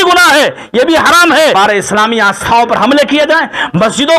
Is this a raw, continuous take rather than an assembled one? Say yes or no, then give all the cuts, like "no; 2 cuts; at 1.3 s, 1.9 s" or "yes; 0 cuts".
no; 1 cut; at 1.5 s